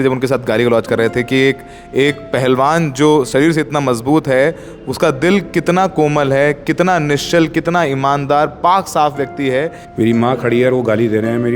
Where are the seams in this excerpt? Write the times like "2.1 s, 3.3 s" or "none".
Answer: 9.8 s